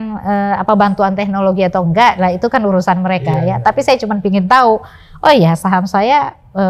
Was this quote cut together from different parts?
no; 0 cuts

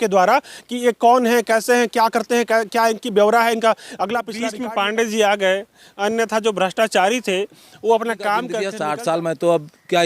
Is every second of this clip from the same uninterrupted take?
no; 2 cuts; at 4.5 s, 8.6 s

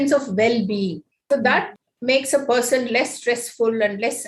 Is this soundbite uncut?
no; 1 cut; at 1.1 s

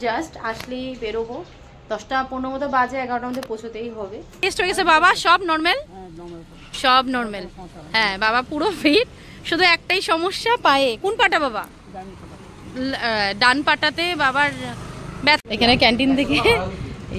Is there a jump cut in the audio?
yes; 2 cuts; at 4.4 s, 15.4 s

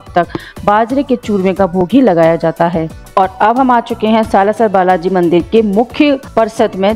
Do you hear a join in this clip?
no; 0 cuts

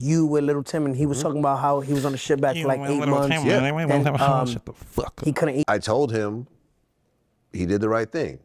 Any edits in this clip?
yes; 1 cut; at 5.6 s

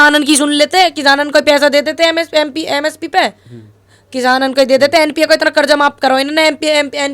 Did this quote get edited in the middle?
no; 0 cuts

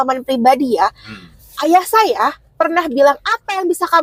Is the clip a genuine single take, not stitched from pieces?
yes; 0 cuts

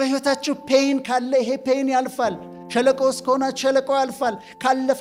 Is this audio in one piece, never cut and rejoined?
yes; 0 cuts

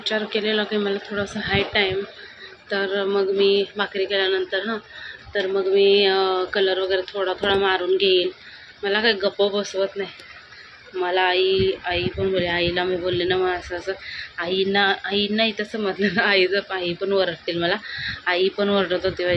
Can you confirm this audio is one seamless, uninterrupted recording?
yes; 0 cuts

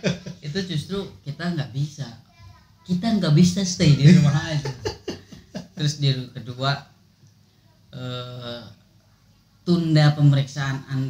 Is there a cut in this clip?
no; 0 cuts

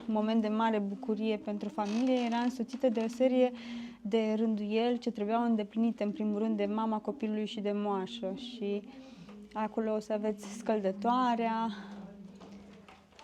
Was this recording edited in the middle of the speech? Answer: no; 0 cuts

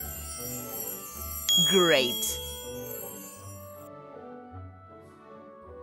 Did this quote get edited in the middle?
yes; 3 cuts; at 1.4 s, 2.2 s, 4.4 s

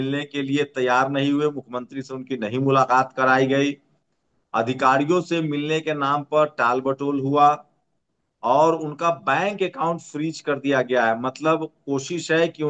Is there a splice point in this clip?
no; 0 cuts

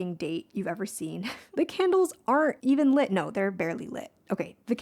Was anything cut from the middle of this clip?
yes; 2 cuts; at 1.4 s, 2.6 s

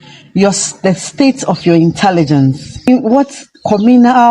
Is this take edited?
yes; 1 cut; at 2.9 s

